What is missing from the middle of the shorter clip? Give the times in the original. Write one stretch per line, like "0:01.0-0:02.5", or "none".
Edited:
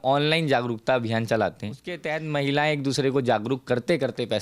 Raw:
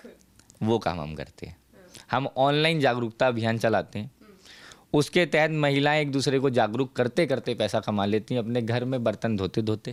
0:04.3-0:05.2